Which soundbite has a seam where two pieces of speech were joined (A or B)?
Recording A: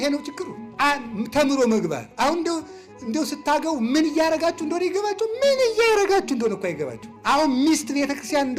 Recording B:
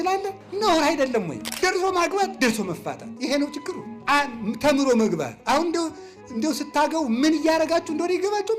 B